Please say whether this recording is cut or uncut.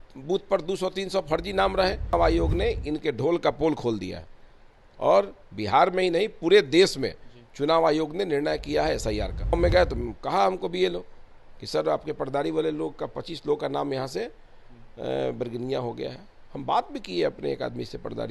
cut